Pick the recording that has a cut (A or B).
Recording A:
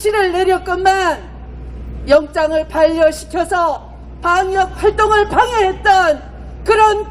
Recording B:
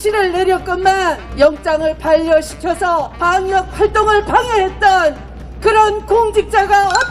B